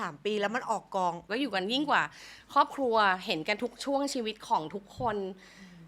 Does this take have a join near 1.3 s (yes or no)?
yes